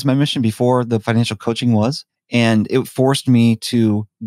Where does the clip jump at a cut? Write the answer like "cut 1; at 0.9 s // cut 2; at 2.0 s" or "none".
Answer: cut 1; at 1.0 s // cut 2; at 2.1 s